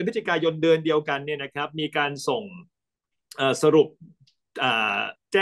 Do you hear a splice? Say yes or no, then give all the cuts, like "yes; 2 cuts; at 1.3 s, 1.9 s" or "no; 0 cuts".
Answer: no; 0 cuts